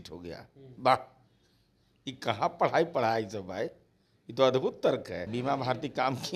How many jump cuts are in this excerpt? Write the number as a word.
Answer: one